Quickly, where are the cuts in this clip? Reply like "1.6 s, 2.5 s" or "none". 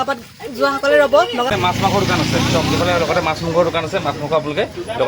1.5 s